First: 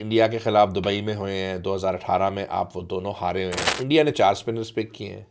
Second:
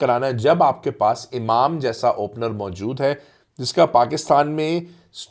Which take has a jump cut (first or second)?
first